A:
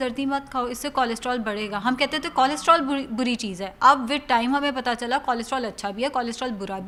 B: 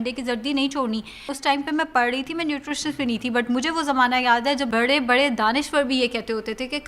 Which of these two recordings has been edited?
B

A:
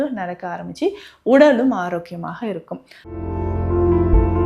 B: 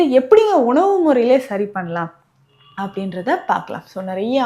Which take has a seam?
A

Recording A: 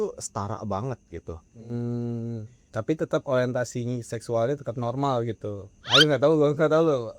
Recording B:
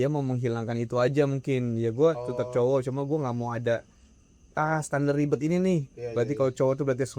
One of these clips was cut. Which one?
A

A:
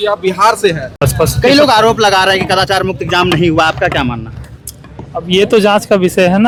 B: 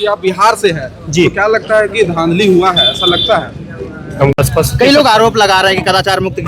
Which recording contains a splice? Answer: B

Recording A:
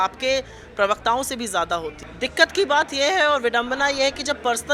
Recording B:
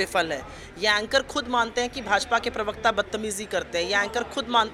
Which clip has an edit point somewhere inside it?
A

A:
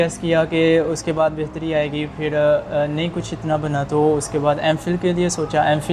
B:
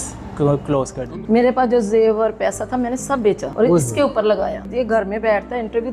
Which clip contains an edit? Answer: B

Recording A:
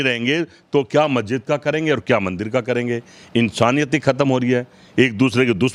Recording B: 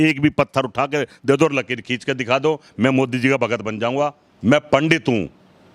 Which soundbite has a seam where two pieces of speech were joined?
B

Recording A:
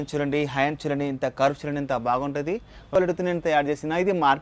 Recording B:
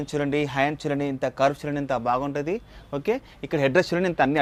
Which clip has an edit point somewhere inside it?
A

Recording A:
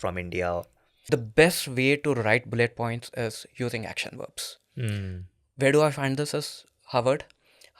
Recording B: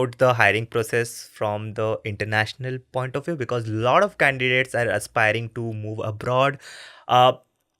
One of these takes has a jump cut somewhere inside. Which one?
A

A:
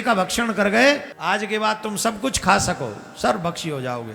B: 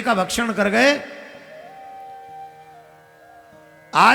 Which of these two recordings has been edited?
A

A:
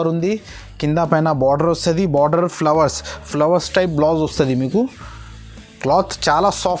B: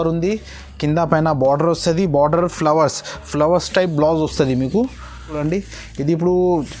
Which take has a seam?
B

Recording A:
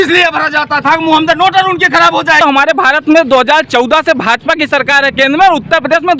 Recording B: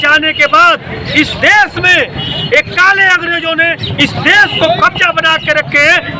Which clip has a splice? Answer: A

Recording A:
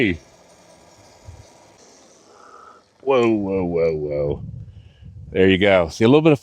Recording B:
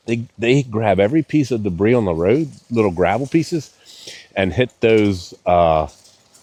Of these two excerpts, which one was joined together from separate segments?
A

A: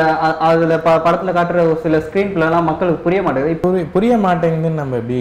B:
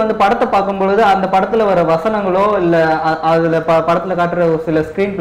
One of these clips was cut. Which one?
A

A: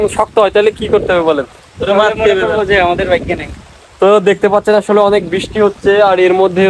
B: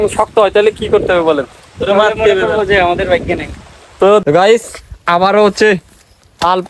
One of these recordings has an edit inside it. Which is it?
B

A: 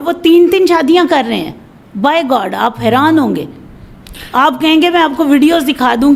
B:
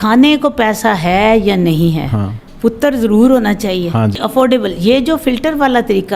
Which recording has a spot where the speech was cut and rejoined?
B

